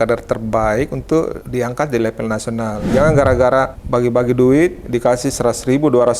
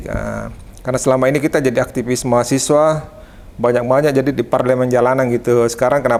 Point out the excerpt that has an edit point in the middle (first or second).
first